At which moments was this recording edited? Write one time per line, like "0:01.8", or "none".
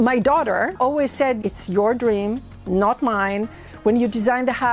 0:01.3

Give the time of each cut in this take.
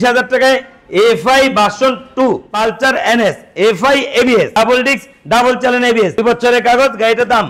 0:02.5
0:04.5
0:06.2

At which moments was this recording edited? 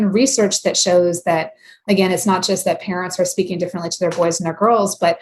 0:01.8

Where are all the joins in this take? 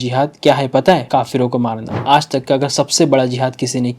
0:01.5

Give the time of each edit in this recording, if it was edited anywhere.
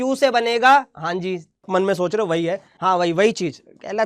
0:01.7
0:02.7

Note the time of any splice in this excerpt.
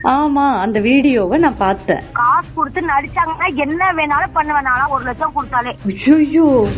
0:02.1
0:05.7

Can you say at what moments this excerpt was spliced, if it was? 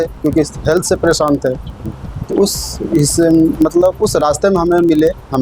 none

